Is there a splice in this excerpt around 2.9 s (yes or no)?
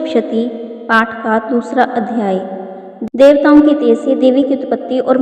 yes